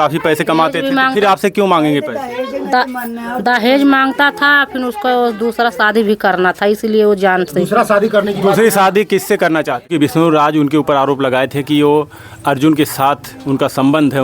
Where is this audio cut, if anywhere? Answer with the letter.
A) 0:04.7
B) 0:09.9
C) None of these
B